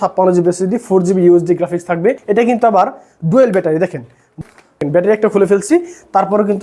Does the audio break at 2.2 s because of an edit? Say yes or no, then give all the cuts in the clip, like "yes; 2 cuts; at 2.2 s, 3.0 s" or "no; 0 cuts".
yes; 1 cut; at 2.2 s